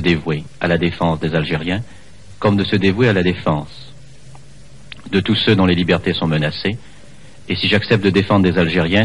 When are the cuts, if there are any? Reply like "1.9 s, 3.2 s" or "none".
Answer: 5.6 s